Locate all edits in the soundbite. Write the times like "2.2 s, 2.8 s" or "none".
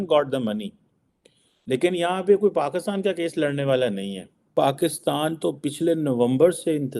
4.5 s